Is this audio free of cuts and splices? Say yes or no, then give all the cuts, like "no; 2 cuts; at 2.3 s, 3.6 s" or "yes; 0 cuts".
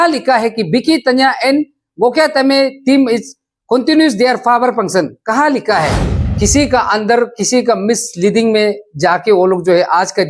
no; 1 cut; at 6.1 s